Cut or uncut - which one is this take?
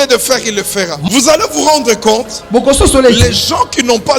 cut